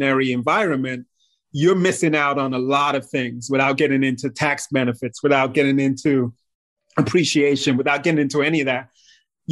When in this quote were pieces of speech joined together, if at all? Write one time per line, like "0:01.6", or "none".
none